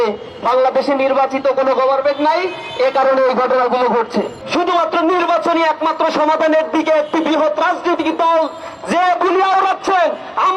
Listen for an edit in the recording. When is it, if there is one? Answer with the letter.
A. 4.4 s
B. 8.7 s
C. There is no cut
A